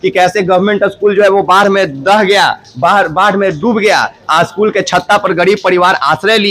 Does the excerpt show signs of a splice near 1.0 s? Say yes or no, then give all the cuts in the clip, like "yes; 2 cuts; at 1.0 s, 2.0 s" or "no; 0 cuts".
no; 0 cuts